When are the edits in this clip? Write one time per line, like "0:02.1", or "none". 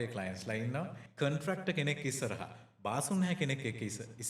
0:01.0